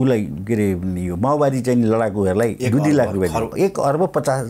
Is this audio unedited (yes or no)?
no